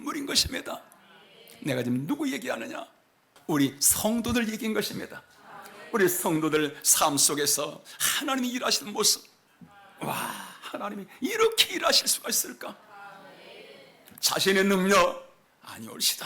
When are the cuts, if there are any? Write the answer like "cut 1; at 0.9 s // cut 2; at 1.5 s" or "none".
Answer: cut 1; at 3.3 s